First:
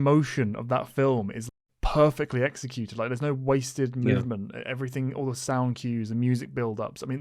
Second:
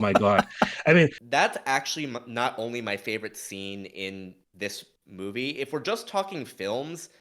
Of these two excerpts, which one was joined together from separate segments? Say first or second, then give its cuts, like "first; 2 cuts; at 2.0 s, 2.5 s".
second; 1 cut; at 1.2 s